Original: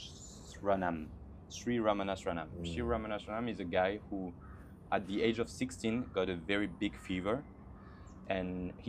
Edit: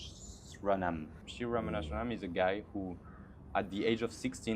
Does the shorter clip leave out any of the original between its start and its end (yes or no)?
yes